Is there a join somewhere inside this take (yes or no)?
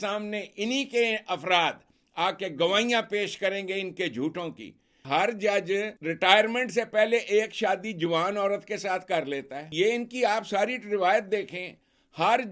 yes